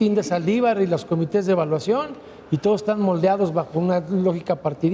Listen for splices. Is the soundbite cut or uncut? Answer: uncut